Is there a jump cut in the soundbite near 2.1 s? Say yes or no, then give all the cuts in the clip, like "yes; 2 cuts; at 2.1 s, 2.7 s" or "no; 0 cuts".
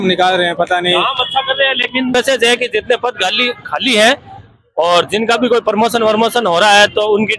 yes; 1 cut; at 2.1 s